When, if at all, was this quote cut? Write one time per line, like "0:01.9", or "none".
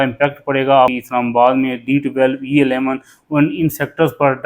0:00.9